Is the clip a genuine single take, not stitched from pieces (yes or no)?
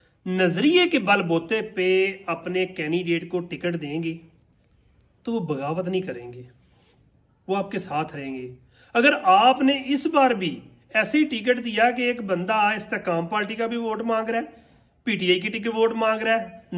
yes